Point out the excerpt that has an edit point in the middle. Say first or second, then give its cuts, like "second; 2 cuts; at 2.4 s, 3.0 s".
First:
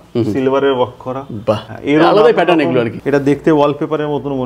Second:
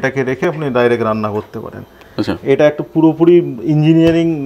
first; 2 cuts; at 1.7 s, 3.0 s